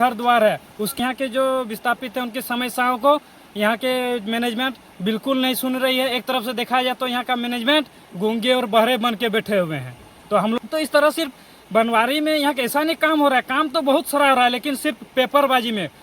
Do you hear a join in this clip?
yes; 2 cuts; at 0.9 s, 10.6 s

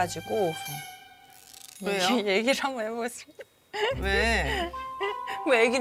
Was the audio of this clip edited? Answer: no; 0 cuts

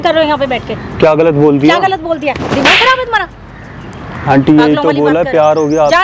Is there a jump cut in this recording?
no; 0 cuts

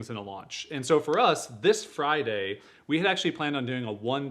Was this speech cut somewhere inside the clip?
no; 0 cuts

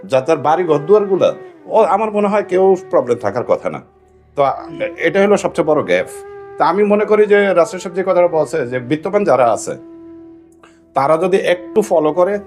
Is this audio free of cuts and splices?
yes; 0 cuts

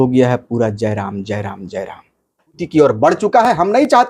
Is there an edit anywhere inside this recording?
yes; 1 cut; at 2.6 s

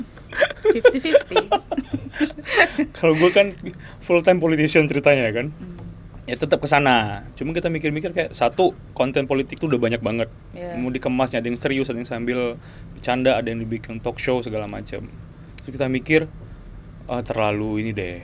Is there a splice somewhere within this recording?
no; 0 cuts

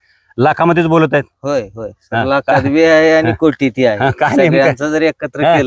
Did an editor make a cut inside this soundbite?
no; 0 cuts

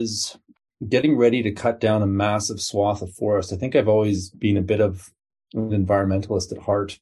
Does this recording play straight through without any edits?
yes; 0 cuts

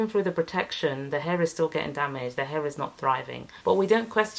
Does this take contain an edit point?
yes; 1 cut; at 3.4 s

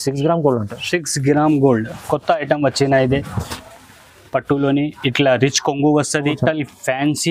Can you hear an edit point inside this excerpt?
yes; 1 cut; at 6.1 s

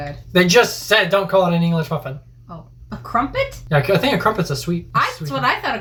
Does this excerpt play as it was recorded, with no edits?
yes; 0 cuts

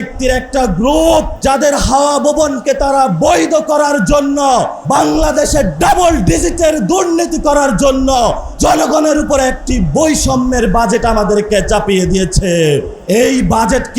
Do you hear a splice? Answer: yes; 4 cuts; at 1.3 s, 4.8 s, 8.5 s, 12.9 s

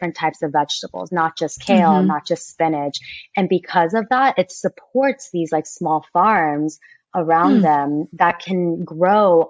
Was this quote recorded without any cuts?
yes; 0 cuts

